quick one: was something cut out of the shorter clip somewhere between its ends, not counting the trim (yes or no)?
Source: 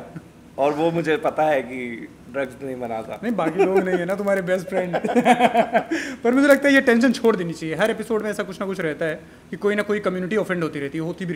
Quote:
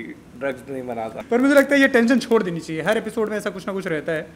yes